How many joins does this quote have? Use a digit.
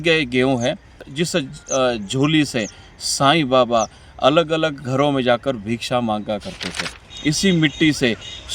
1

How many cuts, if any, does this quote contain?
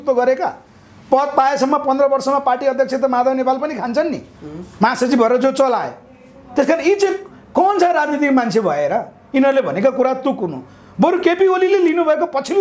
0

